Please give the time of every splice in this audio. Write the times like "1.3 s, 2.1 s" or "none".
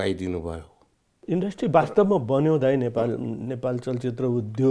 1.2 s